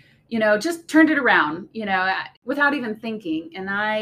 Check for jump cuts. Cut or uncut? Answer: cut